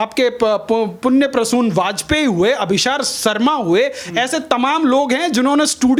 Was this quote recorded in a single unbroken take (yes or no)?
yes